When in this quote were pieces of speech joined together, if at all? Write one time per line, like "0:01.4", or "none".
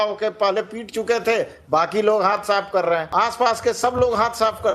0:03.1